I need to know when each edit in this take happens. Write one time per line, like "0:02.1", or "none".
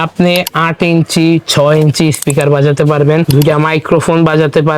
0:03.3

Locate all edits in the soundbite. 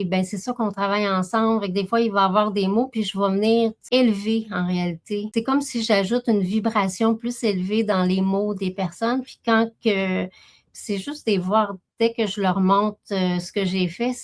0:03.8
0:05.3

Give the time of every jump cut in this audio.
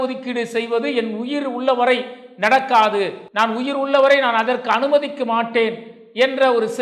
0:03.2

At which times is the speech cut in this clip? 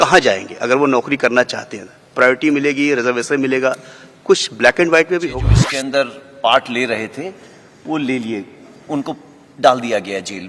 0:05.6

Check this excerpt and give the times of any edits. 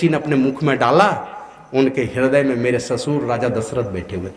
none

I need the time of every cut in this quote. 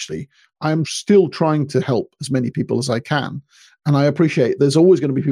0:00.9
0:04.6

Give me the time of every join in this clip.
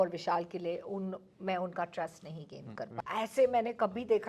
0:02.8

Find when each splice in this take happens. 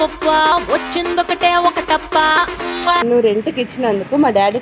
0:03.0

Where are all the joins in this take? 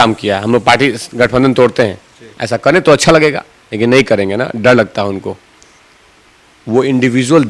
0:03.9

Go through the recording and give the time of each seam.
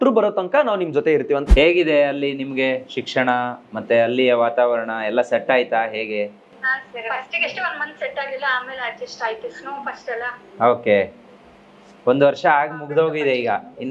0:01.5

